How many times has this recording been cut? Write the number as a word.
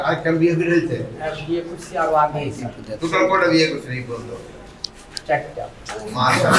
zero